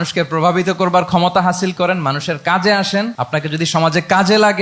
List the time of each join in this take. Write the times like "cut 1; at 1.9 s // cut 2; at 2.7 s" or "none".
cut 1; at 3.2 s